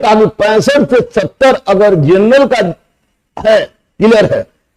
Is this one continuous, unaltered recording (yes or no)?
yes